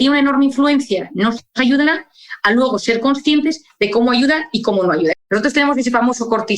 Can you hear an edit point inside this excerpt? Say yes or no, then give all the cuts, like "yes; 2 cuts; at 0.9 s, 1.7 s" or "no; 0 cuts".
yes; 1 cut; at 5.2 s